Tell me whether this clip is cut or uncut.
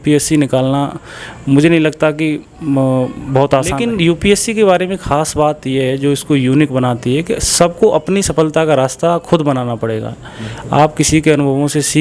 cut